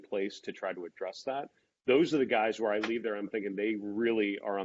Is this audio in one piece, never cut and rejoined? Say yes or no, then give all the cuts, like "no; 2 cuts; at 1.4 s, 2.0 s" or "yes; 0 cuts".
yes; 0 cuts